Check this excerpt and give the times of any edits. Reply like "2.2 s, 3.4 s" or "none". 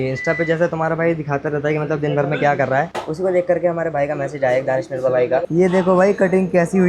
5.5 s

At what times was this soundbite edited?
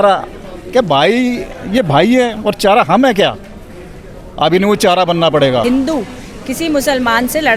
5.6 s

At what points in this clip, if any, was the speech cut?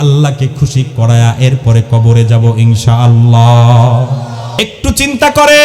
4.6 s

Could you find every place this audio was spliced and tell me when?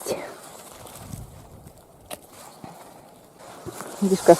3.4 s

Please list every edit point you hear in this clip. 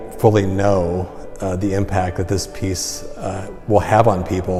none

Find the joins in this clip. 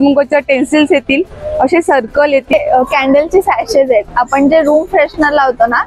2.5 s

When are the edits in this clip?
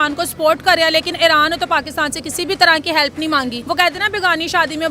3.6 s

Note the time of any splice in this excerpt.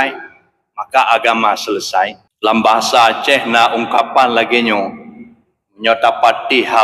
2.2 s

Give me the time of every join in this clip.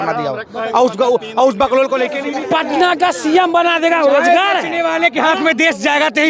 2.2 s

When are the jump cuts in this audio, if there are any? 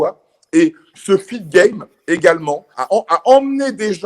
2.7 s

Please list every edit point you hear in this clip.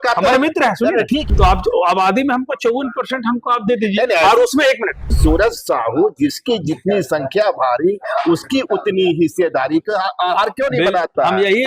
1.2 s, 5.2 s

